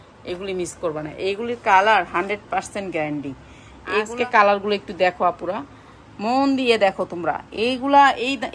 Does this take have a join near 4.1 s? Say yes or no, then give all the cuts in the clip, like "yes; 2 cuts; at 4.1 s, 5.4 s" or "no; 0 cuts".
yes; 1 cut; at 4.1 s